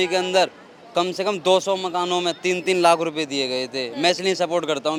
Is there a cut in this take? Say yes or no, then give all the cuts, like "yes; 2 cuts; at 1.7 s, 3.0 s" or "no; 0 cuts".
no; 0 cuts